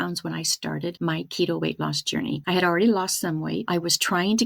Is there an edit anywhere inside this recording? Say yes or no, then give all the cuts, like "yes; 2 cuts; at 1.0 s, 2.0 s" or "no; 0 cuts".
yes; 3 cuts; at 1.0 s, 2.4 s, 3.6 s